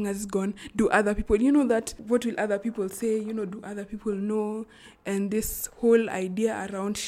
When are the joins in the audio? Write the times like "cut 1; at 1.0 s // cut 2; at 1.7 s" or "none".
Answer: none